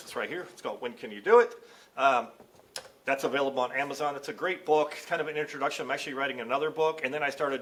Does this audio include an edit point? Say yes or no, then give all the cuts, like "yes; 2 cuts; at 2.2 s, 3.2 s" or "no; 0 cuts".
no; 0 cuts